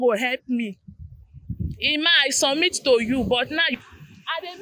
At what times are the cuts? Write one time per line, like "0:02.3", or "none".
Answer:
0:03.7